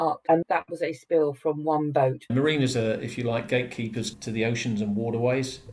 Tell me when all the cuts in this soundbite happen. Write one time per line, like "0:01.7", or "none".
0:02.3